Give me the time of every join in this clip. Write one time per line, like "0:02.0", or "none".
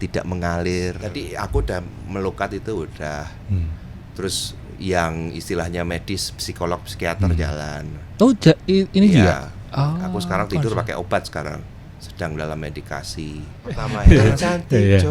0:01.0
0:13.9